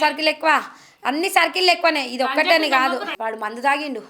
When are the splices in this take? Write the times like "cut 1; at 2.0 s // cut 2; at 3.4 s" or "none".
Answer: cut 1; at 3.1 s